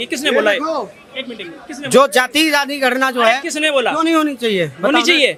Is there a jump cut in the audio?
no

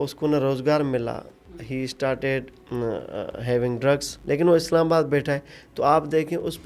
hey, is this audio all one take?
no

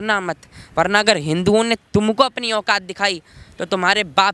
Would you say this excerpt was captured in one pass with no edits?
yes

